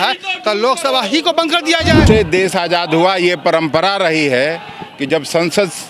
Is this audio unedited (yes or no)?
no